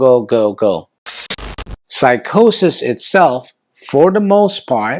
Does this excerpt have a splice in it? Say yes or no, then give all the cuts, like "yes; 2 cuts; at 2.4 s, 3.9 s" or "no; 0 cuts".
yes; 1 cut; at 1.2 s